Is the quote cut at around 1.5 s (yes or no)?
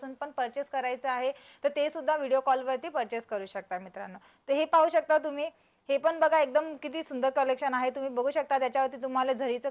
no